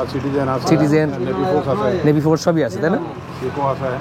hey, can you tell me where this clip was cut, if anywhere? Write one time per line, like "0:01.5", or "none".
none

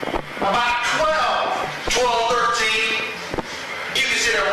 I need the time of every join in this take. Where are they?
none

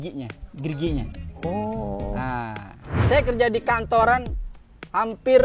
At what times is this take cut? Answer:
0:03.0

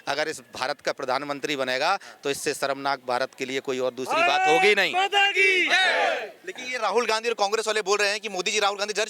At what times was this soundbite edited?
none

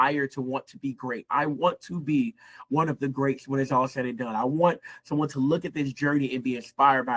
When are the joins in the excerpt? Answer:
none

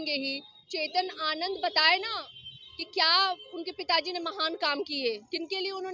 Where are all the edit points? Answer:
none

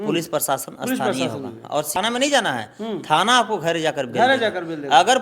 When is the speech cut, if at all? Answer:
0:02.0

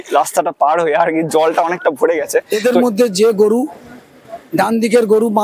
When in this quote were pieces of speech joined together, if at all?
0:02.5

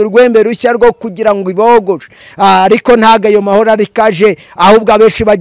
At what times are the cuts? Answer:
0:02.2

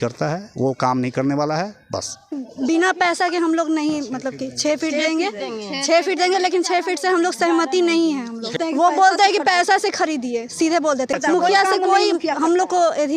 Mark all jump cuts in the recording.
0:02.4
0:08.6
0:11.2

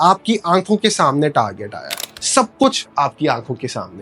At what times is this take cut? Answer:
0:02.0

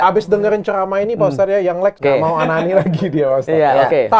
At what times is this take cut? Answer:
0:02.0

